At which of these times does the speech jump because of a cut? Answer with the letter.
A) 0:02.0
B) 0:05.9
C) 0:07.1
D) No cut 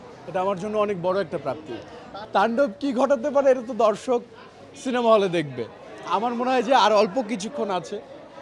D